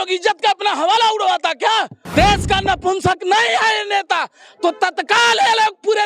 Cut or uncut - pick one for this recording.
cut